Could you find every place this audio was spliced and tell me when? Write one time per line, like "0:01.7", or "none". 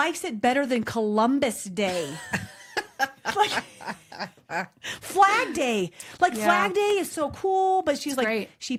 none